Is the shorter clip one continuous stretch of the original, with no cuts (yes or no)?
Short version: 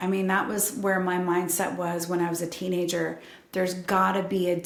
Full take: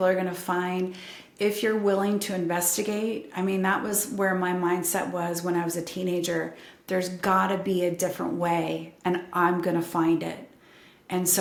yes